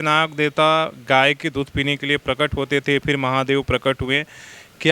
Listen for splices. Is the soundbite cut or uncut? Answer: uncut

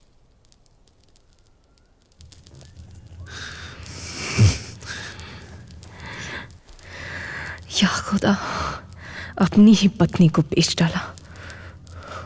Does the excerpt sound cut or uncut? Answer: uncut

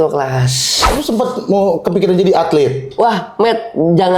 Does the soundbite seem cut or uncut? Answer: cut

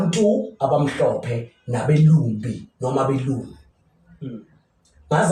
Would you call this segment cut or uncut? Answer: uncut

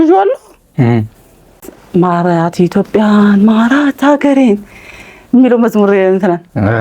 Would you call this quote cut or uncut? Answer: cut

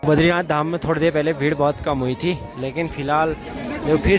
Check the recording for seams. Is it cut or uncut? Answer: uncut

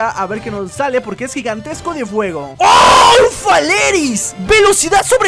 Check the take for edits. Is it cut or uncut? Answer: uncut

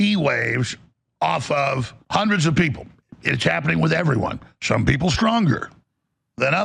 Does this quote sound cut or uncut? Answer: cut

